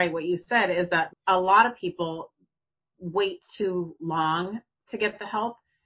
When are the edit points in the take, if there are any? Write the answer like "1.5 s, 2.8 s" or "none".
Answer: 1.1 s